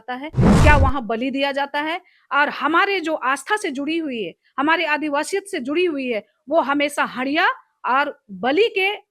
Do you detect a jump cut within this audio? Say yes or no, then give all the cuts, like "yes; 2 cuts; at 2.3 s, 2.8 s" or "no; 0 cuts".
no; 0 cuts